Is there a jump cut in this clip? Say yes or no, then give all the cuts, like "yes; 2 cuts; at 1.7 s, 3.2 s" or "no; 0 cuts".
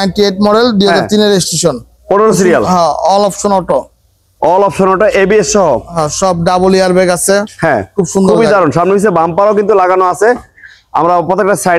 no; 0 cuts